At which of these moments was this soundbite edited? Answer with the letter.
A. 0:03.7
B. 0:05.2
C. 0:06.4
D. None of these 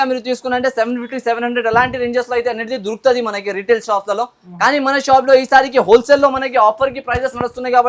D